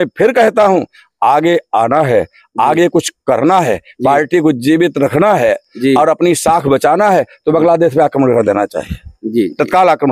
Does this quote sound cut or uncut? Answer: uncut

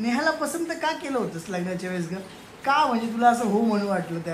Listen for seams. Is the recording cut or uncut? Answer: uncut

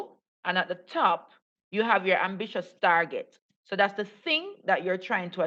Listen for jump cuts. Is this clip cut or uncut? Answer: uncut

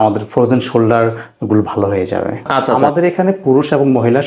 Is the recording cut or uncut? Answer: cut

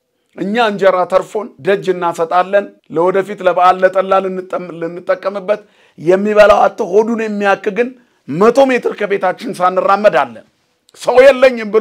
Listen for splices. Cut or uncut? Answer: cut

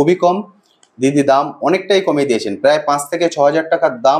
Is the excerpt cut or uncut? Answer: uncut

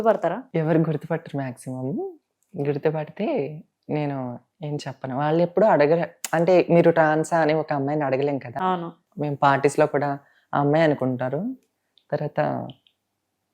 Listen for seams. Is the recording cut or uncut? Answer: cut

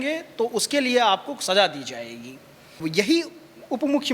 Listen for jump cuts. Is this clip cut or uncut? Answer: cut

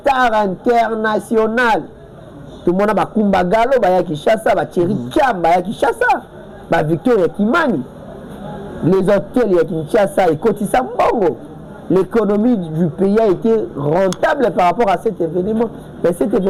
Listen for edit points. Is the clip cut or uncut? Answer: uncut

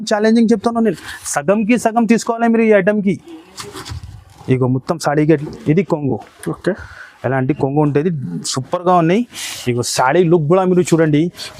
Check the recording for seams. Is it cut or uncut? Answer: cut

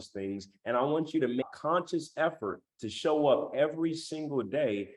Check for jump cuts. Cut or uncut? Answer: cut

